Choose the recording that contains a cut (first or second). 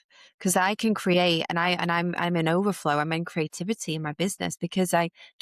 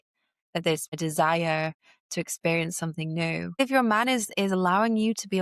second